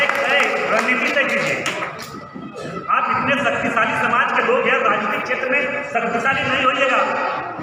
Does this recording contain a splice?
no; 0 cuts

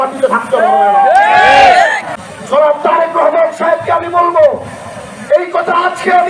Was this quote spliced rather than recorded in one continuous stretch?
yes; 1 cut; at 2.1 s

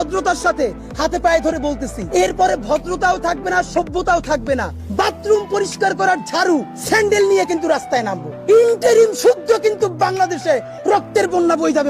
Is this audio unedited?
no; 4 cuts; at 1.9 s, 4.8 s, 6.7 s, 8.3 s

